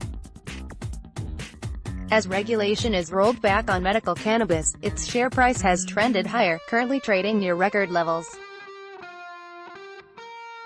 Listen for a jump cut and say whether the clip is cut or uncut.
uncut